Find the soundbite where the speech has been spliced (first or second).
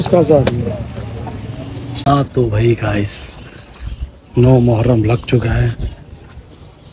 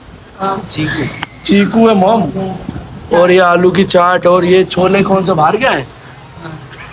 first